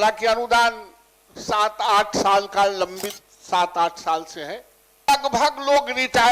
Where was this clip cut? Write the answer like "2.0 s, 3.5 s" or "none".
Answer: 5.1 s